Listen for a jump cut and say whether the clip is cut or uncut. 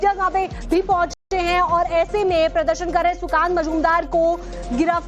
uncut